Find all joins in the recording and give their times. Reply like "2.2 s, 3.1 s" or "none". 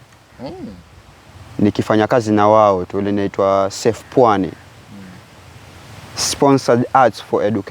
none